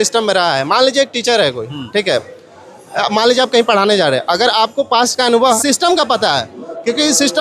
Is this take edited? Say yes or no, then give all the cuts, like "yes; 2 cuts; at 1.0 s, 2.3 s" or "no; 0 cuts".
yes; 1 cut; at 5.6 s